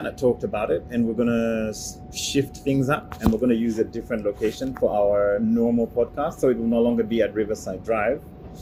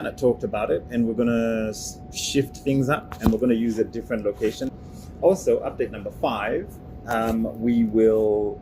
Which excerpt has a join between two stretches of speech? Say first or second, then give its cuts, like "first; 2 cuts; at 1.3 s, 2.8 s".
second; 1 cut; at 4.7 s